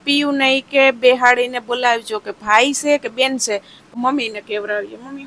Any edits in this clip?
yes; 1 cut; at 3.8 s

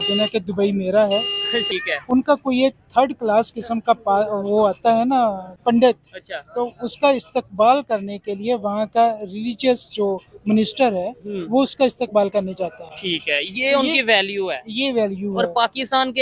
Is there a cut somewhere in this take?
yes; 1 cut; at 1.7 s

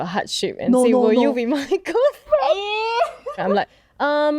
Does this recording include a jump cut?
yes; 1 cut; at 3.4 s

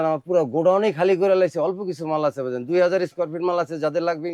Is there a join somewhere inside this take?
no; 0 cuts

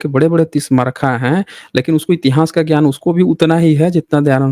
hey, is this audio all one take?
yes; 0 cuts

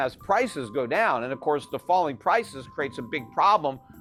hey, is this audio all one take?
yes; 0 cuts

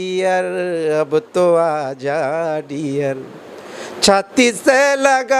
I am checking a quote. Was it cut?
no; 0 cuts

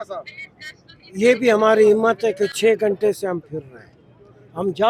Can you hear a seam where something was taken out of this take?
no; 0 cuts

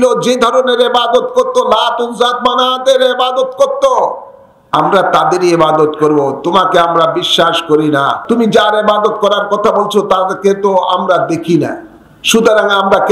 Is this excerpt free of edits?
no; 1 cut; at 8.2 s

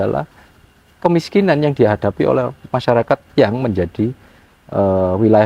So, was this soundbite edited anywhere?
no; 0 cuts

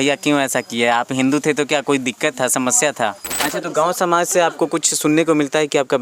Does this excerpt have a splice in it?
yes; 1 cut; at 3.3 s

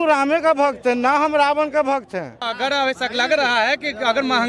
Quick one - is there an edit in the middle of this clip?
yes; 1 cut; at 2.5 s

